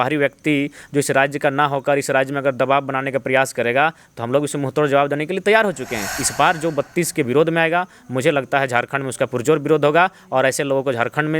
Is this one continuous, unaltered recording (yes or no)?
no